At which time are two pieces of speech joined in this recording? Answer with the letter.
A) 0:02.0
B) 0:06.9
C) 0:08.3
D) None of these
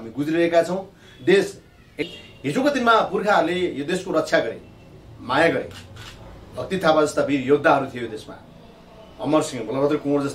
A